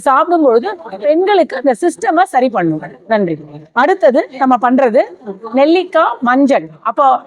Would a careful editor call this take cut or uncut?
uncut